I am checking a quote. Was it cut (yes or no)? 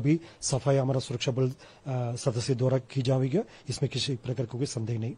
no